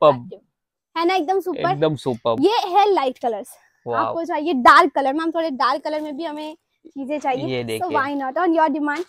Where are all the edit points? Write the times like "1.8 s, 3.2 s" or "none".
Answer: none